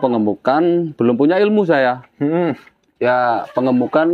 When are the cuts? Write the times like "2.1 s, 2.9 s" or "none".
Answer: none